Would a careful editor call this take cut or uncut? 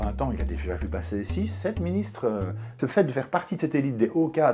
cut